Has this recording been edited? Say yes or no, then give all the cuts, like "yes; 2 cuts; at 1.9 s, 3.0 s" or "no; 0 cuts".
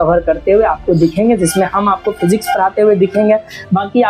no; 0 cuts